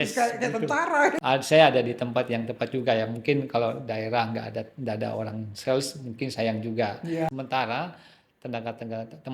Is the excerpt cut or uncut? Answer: cut